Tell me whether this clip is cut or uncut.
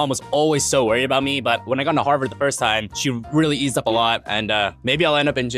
uncut